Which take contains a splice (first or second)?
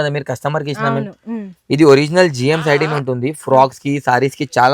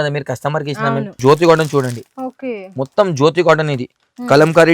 second